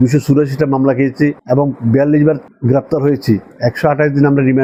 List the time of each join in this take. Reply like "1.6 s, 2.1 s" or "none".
none